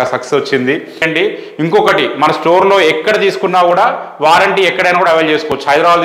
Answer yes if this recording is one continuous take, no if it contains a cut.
no